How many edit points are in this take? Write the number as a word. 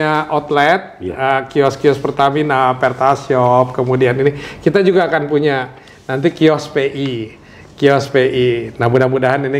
zero